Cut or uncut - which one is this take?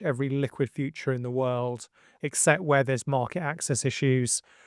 uncut